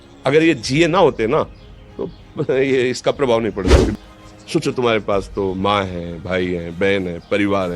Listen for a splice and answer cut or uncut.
cut